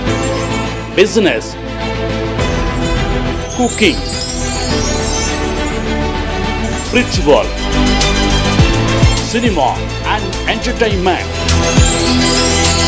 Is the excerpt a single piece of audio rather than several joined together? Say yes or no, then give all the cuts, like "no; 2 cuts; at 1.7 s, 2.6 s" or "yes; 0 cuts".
yes; 0 cuts